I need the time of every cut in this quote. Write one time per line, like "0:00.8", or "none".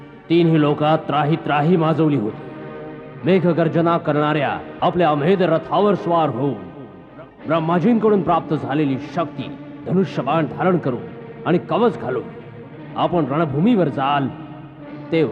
none